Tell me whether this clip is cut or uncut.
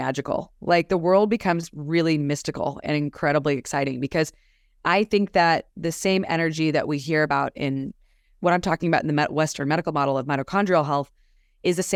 uncut